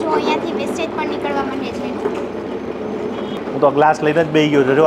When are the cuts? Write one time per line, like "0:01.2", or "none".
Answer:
0:03.4